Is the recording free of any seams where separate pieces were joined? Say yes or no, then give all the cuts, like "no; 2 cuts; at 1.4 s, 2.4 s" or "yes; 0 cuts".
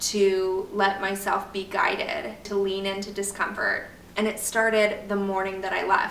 no; 2 cuts; at 2.5 s, 4.0 s